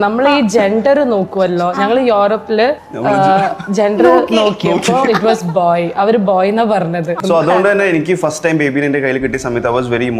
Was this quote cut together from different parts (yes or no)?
yes